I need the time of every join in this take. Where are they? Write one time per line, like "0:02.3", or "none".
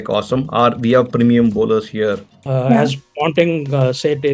0:02.4